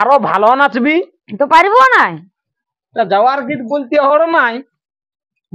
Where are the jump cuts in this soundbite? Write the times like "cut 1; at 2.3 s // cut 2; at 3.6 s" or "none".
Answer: cut 1; at 2.6 s